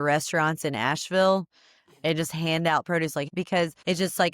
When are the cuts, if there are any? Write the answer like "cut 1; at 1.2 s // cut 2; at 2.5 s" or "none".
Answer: cut 1; at 3.3 s